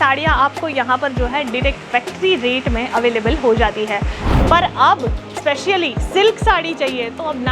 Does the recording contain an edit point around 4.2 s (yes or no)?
yes